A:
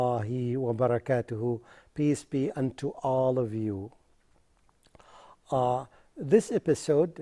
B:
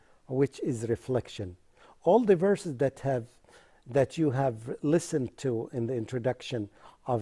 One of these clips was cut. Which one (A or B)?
A